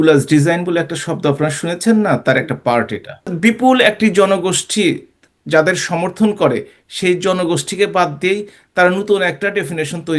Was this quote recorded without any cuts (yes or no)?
no